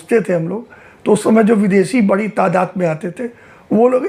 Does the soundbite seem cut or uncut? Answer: uncut